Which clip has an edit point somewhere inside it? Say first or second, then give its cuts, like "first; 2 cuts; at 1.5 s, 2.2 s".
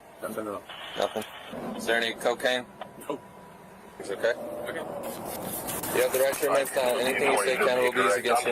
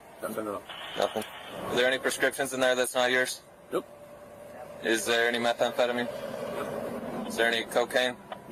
first; 2 cuts; at 1.5 s, 4.1 s